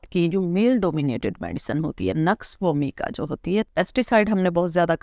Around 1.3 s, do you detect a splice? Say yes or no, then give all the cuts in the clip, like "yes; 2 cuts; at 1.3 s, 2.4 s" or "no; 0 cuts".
no; 1 cut; at 3.7 s